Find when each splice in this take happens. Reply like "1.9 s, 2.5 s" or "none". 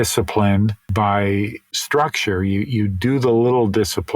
0.8 s, 1.7 s